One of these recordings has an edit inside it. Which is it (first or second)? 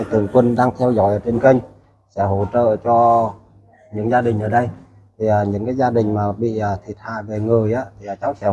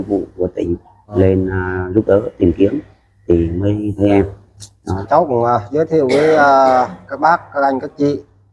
second